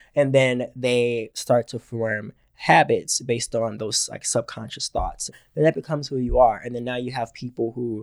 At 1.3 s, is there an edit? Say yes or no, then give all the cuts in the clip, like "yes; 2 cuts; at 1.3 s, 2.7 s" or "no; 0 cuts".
yes; 2 cuts; at 1.3 s, 5.4 s